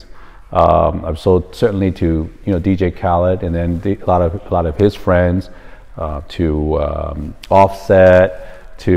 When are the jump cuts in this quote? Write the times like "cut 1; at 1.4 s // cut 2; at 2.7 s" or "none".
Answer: none